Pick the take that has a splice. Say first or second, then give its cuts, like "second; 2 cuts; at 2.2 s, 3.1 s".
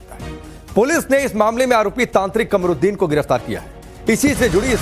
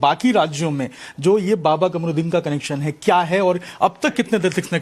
first; 1 cut; at 2.0 s